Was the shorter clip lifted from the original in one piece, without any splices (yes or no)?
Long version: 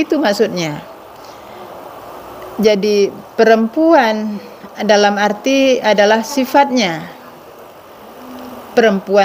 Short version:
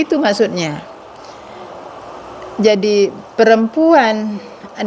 yes